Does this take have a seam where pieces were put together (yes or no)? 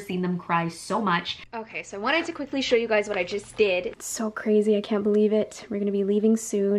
yes